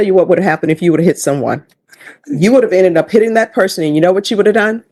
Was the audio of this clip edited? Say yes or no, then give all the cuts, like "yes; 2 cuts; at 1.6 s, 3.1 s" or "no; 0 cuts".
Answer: no; 0 cuts